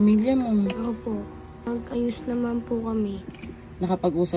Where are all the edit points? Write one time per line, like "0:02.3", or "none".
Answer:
0:01.7

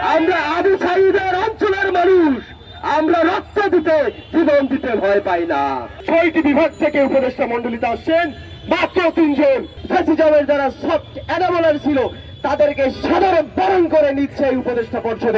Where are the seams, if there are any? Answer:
0:05.9
0:09.7

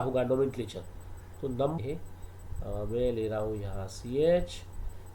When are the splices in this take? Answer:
0:01.8

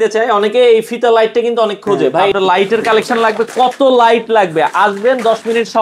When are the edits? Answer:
0:02.2

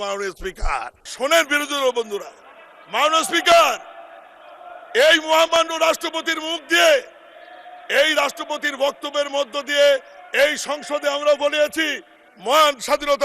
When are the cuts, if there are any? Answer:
0:01.0

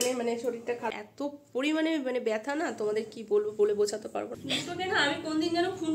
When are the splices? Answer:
0:00.9
0:04.4

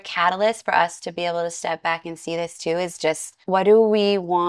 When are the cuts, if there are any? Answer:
0:03.3

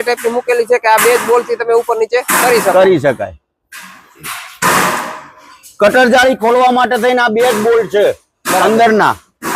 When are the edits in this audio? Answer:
none

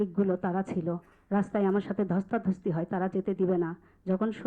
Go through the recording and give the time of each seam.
none

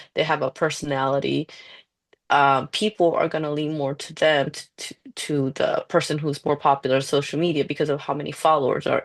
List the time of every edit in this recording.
none

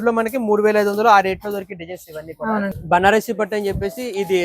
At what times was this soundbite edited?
0:02.7

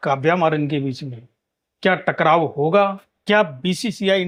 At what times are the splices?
none

